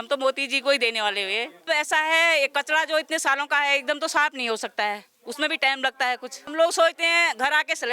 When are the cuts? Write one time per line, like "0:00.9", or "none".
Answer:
0:01.7
0:06.5